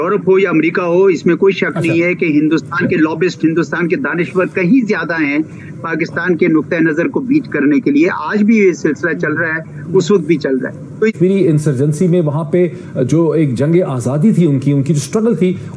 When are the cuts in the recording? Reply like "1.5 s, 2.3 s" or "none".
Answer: none